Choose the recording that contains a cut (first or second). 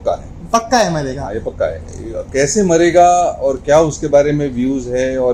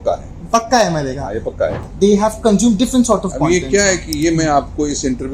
second